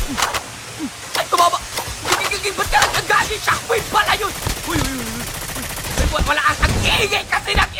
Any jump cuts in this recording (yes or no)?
no